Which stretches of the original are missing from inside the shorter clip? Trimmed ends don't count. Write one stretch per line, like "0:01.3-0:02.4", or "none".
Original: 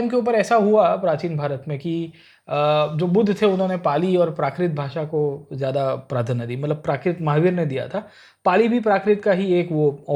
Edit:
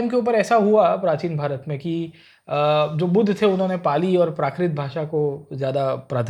none